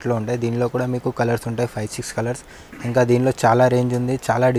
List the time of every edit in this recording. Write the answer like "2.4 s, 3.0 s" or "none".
none